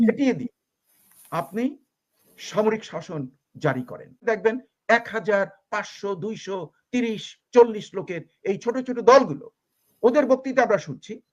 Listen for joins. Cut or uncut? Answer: cut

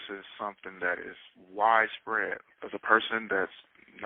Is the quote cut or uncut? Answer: cut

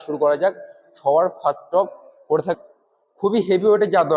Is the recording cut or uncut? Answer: cut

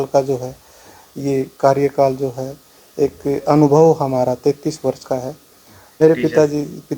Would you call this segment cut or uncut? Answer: cut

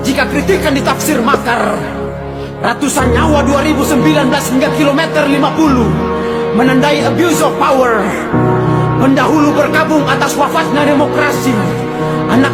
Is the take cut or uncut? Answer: uncut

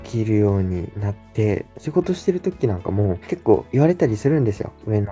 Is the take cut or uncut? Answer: uncut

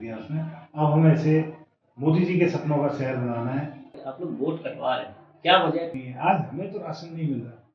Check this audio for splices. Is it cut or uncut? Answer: cut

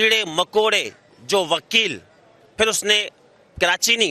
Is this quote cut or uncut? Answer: uncut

